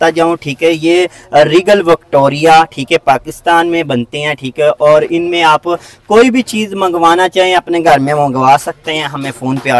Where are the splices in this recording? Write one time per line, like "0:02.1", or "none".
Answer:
none